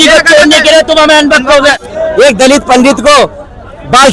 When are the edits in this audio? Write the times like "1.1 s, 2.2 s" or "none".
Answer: 1.8 s